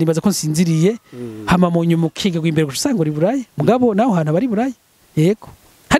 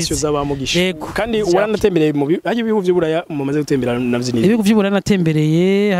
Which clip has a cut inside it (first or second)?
second